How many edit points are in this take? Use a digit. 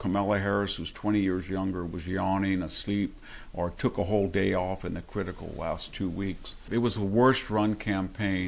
1